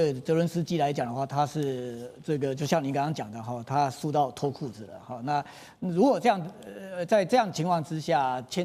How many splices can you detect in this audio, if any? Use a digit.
0